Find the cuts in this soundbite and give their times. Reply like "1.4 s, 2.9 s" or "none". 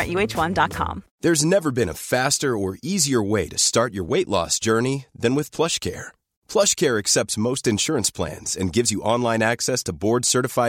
1.0 s